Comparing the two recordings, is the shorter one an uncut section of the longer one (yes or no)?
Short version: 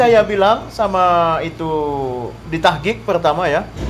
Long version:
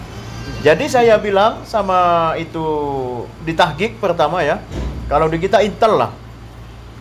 yes